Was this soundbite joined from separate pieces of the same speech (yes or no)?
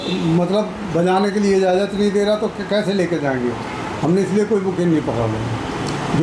no